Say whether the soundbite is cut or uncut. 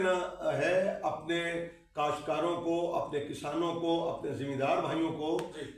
uncut